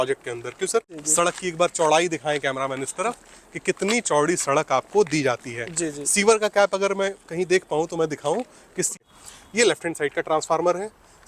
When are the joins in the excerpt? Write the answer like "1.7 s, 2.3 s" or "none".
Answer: 0.9 s, 8.9 s